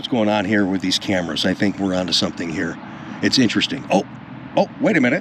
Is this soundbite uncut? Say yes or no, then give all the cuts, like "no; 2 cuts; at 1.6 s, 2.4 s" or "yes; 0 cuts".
yes; 0 cuts